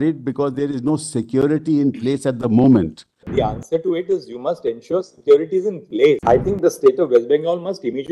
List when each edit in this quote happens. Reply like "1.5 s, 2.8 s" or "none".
3.2 s, 6.2 s